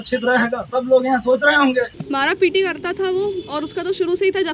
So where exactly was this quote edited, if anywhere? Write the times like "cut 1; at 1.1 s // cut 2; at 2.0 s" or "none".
cut 1; at 2.0 s